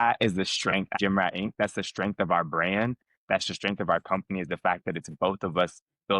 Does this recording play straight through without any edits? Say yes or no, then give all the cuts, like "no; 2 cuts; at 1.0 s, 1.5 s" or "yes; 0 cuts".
no; 1 cut; at 0.9 s